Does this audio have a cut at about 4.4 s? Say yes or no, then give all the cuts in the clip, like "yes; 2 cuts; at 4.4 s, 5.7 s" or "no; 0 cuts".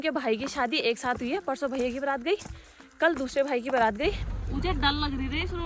yes; 1 cut; at 4.4 s